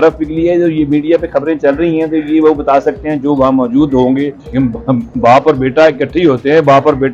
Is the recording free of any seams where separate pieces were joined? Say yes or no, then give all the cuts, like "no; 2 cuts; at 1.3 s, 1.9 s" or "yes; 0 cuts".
no; 1 cut; at 4.4 s